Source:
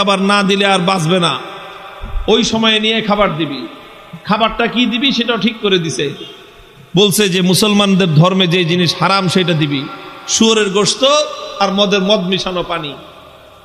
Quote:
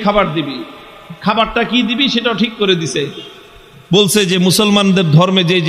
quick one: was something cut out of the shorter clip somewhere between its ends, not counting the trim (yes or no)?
no